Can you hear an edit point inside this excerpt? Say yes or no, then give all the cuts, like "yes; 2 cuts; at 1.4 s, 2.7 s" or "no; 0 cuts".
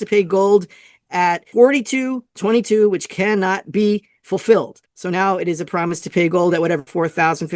yes; 1 cut; at 1.4 s